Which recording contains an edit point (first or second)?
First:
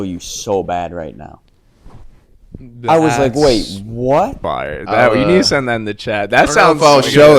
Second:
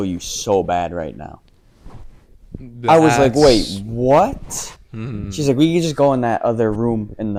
first